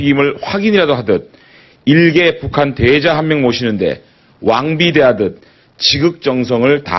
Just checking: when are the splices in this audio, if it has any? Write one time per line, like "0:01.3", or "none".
0:03.3